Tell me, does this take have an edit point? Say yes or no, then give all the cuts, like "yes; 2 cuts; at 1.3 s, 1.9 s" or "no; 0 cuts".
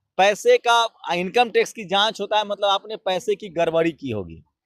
no; 0 cuts